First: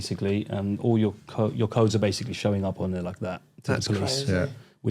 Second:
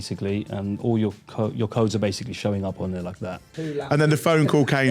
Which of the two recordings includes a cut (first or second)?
second